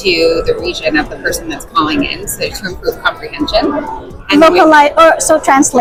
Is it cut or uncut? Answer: uncut